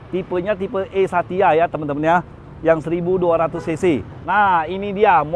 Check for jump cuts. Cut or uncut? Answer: cut